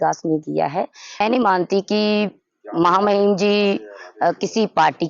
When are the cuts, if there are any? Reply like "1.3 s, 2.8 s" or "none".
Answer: 1.2 s